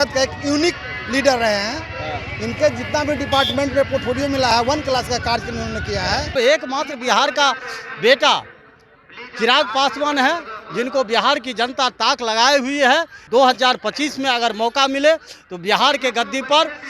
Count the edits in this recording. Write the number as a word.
two